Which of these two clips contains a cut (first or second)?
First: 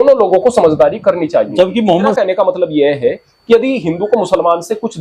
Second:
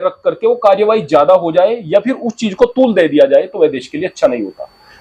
first